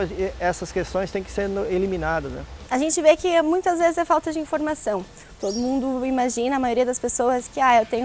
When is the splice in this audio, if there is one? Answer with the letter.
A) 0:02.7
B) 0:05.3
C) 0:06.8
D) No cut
A